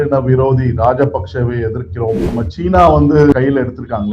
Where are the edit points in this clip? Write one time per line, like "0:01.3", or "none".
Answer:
0:02.3
0:03.3